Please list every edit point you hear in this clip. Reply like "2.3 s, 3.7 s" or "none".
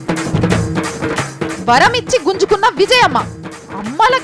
1.3 s